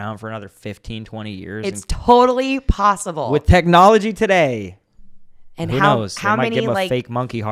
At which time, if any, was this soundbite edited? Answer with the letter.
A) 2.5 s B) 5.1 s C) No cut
C